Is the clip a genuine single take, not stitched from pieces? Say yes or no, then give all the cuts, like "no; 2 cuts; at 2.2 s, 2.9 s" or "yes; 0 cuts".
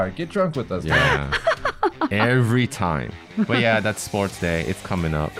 no; 1 cut; at 3.3 s